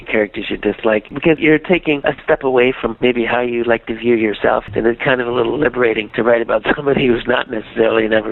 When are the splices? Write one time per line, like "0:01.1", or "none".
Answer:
0:04.7

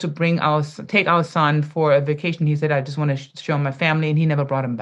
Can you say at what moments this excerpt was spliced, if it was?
none

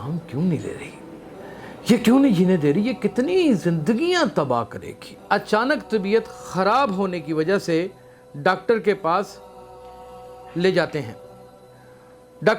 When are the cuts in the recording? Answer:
0:05.2

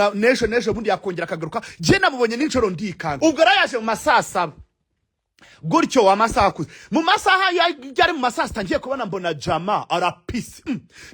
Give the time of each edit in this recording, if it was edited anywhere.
0:03.1

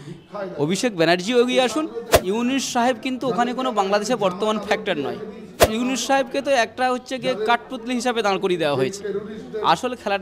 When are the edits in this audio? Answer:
0:02.1
0:05.7

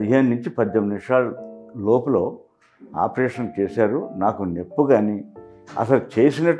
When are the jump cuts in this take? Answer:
none

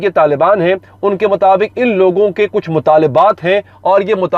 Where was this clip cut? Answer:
none

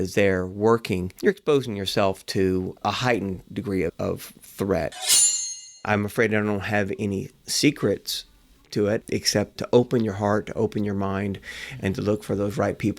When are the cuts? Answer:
0:01.1
0:02.8
0:03.9
0:05.2
0:09.2

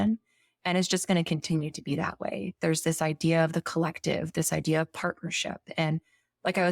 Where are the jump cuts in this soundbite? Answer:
none

